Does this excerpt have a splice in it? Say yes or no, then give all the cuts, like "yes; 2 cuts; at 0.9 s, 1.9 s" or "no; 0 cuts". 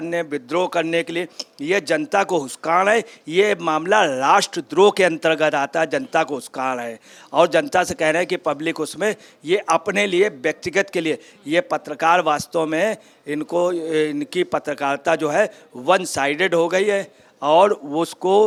no; 0 cuts